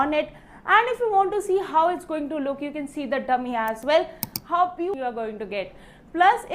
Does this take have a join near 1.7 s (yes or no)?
no